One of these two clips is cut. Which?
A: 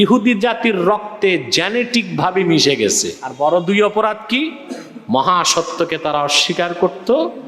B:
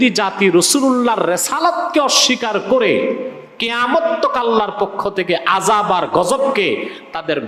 A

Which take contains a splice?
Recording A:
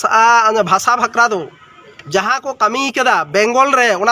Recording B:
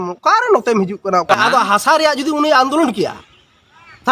B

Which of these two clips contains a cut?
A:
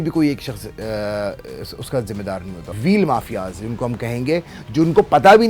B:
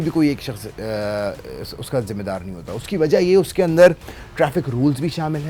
A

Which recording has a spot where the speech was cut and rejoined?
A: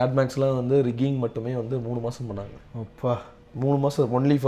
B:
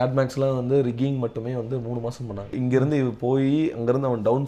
B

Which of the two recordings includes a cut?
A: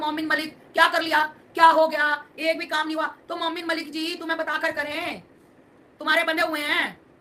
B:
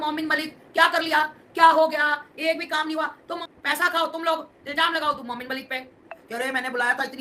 B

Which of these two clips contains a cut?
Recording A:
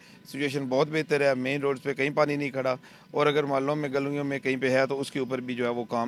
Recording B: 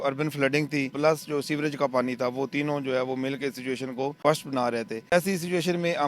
B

